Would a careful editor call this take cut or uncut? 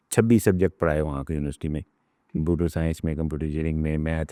uncut